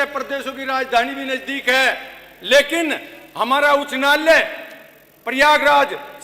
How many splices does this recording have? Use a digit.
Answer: 0